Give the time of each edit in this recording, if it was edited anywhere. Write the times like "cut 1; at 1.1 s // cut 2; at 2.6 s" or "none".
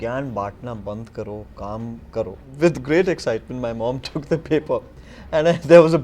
cut 1; at 2.4 s